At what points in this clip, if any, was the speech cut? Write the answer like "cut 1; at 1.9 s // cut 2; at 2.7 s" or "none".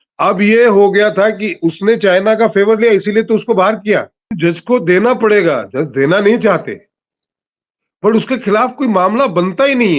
cut 1; at 4.3 s